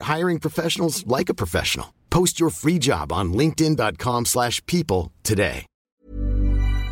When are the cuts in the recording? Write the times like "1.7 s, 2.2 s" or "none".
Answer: 5.7 s

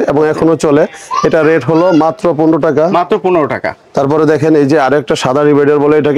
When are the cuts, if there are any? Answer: none

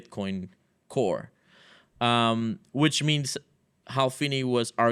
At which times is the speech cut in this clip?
none

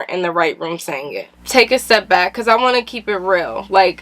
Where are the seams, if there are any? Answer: 1.4 s

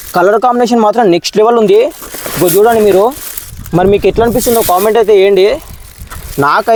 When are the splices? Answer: none

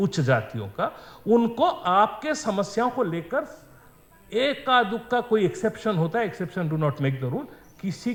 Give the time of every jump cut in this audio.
none

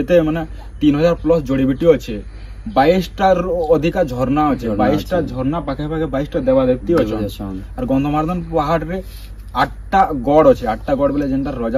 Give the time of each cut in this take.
none

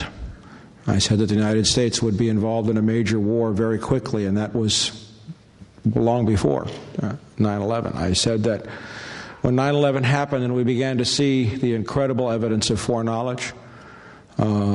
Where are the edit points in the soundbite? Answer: 10.4 s

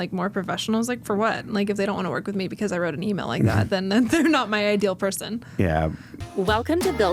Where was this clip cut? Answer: 6.1 s

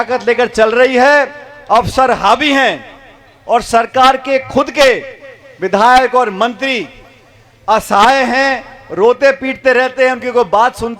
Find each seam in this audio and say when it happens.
none

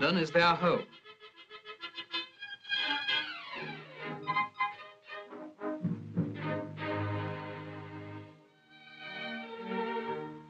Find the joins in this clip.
7.4 s

